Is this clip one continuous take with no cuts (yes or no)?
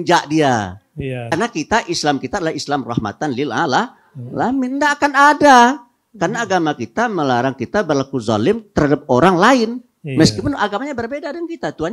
no